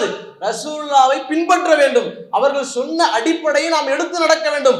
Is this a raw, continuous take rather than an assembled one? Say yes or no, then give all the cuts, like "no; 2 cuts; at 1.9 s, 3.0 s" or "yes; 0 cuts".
yes; 0 cuts